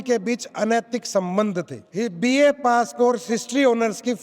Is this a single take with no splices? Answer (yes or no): no